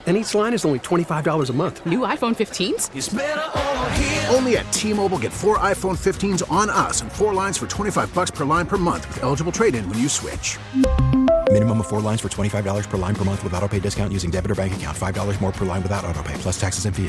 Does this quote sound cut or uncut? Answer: uncut